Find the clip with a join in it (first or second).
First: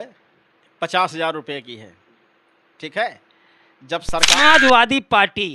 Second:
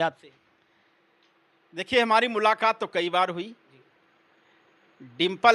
first